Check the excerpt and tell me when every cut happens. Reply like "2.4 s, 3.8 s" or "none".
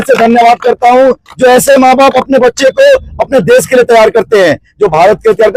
none